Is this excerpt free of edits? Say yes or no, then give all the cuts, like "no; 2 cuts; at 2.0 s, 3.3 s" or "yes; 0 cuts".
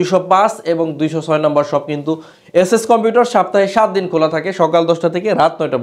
yes; 0 cuts